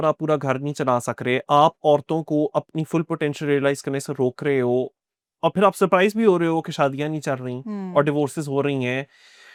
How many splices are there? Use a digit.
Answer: 0